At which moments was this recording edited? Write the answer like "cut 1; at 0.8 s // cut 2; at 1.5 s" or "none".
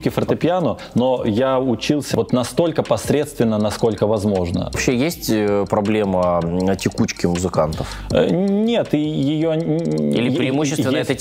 cut 1; at 2.1 s // cut 2; at 4.8 s